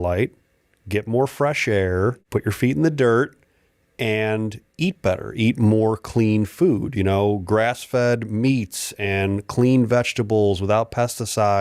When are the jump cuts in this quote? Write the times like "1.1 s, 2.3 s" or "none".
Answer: 2.0 s